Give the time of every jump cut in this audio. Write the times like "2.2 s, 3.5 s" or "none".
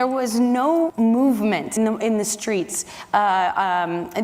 0.9 s, 1.7 s